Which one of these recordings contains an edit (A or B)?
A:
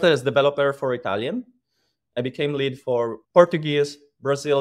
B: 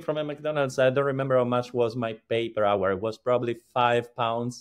A